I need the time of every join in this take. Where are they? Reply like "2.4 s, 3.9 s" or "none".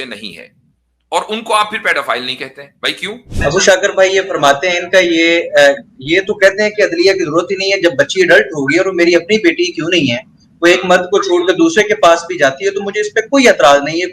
3.4 s